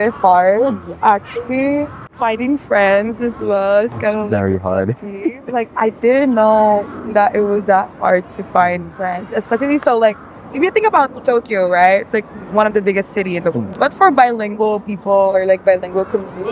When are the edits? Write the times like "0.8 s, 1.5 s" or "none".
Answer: none